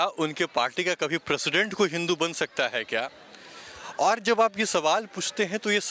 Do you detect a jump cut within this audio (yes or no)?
no